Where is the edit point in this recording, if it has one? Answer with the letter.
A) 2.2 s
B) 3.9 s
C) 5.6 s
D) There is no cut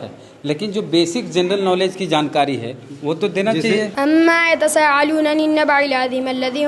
B